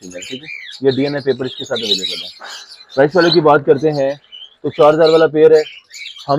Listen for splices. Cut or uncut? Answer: uncut